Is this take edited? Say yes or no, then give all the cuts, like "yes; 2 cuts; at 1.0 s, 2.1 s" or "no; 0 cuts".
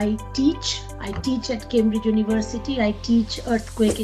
no; 0 cuts